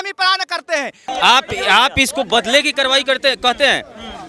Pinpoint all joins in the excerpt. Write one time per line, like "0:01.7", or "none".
0:01.0